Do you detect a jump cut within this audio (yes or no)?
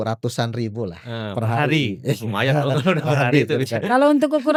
no